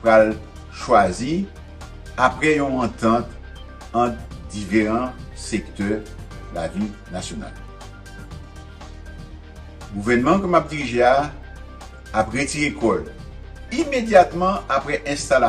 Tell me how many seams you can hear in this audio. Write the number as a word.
two